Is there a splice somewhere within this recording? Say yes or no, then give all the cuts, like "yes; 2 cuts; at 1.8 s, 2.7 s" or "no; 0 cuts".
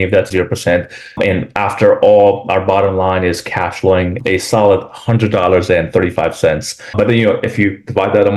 no; 0 cuts